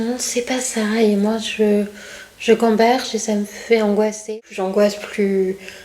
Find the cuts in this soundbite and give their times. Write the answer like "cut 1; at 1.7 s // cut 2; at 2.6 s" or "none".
cut 1; at 4.2 s